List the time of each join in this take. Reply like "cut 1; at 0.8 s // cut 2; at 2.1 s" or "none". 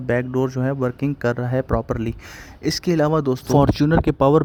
none